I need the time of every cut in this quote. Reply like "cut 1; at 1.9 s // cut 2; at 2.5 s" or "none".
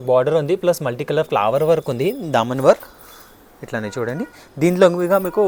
none